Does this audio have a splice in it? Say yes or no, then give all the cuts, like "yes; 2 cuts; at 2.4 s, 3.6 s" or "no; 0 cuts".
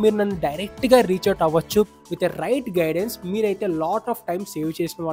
yes; 1 cut; at 1.9 s